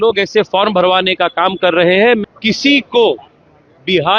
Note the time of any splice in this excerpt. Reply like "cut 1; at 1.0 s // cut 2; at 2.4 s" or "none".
cut 1; at 2.2 s